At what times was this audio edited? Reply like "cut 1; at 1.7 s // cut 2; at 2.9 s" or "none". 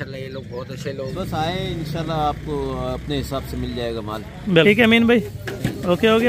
cut 1; at 1.1 s // cut 2; at 4.6 s